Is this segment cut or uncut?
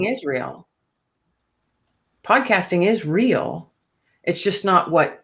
uncut